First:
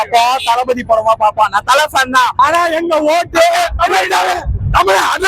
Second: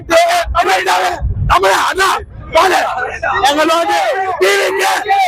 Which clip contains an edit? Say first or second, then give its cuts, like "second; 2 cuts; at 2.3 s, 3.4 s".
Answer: first; 1 cut; at 2.3 s